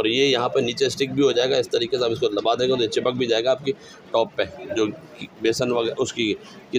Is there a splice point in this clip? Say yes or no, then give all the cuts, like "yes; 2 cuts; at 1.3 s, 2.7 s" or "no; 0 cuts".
no; 0 cuts